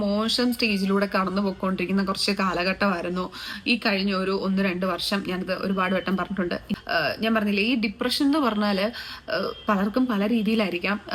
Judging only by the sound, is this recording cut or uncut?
cut